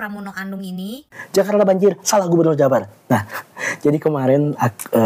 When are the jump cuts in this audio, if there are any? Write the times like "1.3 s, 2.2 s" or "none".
1.1 s